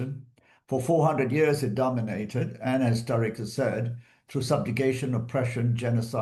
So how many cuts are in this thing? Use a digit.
0